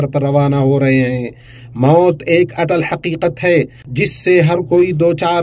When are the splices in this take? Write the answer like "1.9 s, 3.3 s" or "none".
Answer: 3.8 s